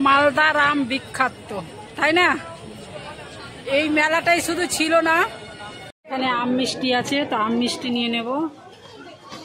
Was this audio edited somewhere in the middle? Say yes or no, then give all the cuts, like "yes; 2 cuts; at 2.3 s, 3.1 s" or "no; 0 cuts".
yes; 1 cut; at 5.9 s